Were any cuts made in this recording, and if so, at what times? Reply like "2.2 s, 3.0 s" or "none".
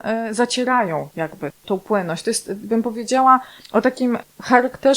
1.5 s, 4.0 s